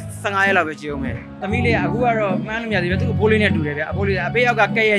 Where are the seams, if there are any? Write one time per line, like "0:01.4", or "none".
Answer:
0:01.4

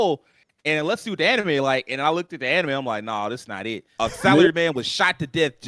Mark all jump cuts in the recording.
0:03.9

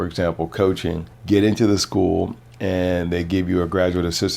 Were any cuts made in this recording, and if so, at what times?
0:01.1

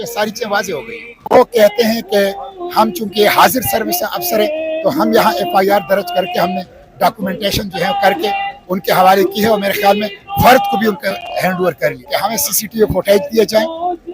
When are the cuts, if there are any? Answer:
0:01.1
0:12.0

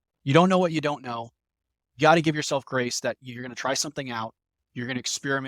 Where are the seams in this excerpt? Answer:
none

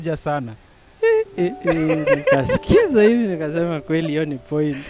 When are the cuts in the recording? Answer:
none

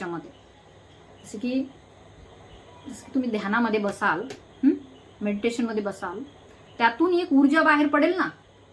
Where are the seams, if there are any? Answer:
none

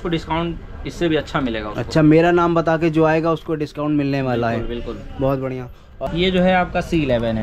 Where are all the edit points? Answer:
0:06.0

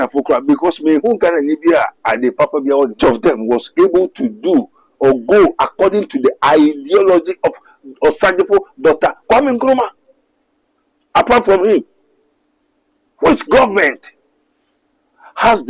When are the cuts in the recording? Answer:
0:03.0

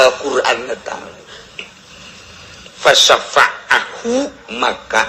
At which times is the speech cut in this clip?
none

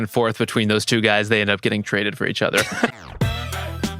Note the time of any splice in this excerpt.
0:02.9

